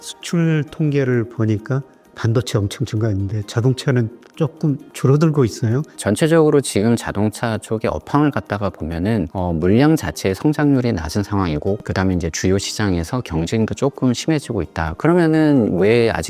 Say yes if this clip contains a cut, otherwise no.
yes